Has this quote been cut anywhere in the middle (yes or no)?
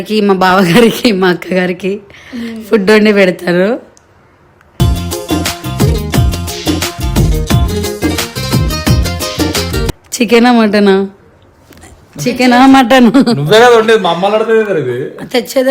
no